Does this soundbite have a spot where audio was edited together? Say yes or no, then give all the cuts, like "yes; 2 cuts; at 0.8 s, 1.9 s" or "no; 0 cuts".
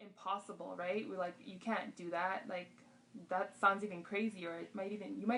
no; 0 cuts